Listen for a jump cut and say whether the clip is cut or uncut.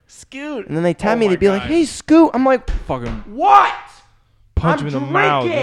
uncut